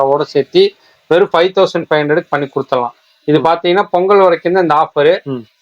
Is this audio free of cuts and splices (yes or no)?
yes